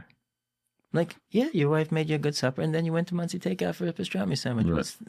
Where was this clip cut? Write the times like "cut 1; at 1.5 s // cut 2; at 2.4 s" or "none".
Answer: cut 1; at 1.2 s

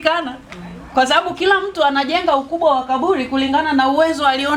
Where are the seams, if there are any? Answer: none

